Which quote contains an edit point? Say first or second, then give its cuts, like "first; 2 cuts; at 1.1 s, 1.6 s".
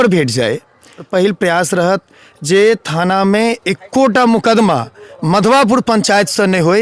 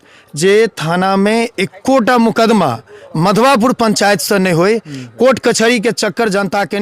first; 1 cut; at 1.1 s